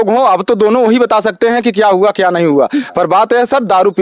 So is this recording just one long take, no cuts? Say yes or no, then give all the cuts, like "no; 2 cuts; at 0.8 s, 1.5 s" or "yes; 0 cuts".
yes; 0 cuts